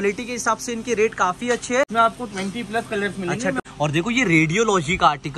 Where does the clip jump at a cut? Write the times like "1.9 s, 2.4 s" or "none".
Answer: 1.9 s, 3.6 s